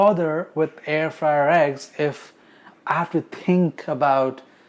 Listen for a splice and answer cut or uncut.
uncut